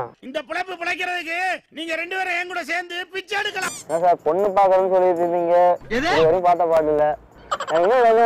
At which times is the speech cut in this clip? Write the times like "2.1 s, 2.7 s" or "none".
3.9 s, 7.2 s